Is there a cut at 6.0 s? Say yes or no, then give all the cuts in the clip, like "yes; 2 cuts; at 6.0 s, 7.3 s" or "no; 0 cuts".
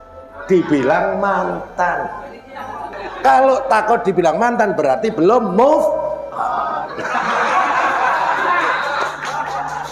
no; 1 cut; at 3.0 s